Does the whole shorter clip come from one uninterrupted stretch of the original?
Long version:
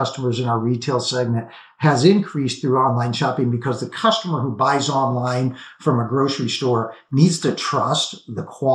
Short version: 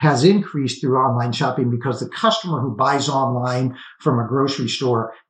yes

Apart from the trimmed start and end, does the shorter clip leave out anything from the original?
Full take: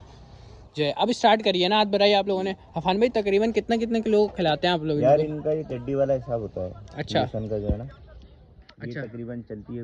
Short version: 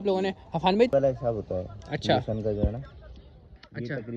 yes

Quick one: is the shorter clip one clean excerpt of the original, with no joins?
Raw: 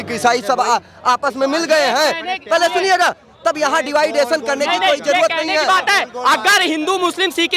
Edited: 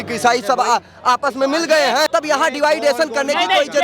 no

